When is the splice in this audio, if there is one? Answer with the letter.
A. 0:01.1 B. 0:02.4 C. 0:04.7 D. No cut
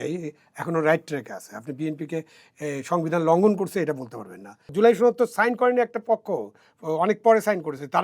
C